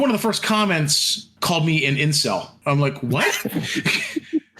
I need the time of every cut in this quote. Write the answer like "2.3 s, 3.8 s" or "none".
1.3 s, 2.5 s